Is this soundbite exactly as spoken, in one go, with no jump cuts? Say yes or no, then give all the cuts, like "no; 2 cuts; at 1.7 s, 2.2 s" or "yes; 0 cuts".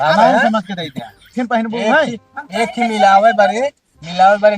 no; 1 cut; at 1.3 s